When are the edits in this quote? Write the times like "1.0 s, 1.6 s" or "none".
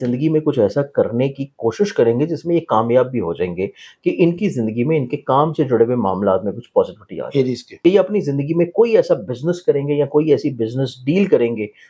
7.7 s